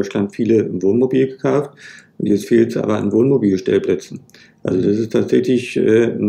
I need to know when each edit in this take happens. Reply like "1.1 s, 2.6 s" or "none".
none

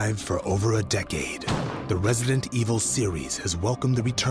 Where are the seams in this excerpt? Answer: 3.2 s

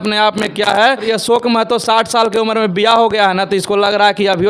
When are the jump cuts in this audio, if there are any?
1.0 s

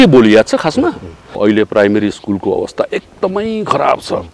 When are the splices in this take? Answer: 1.4 s

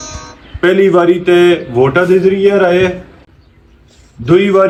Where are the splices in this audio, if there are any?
none

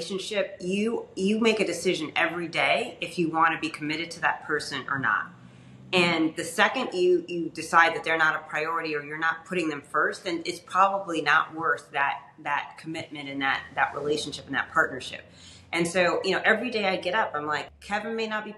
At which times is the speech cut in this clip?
17.7 s

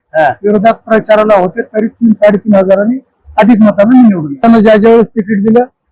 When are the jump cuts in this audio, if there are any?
4.4 s

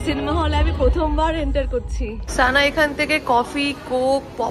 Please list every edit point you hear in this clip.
2.4 s

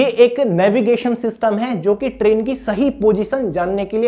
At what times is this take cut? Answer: none

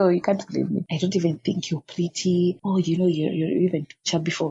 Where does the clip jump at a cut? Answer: 0.9 s, 2.6 s

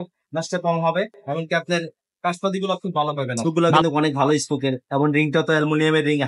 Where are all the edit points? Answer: 3.6 s

